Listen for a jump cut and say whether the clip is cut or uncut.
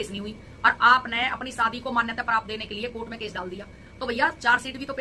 uncut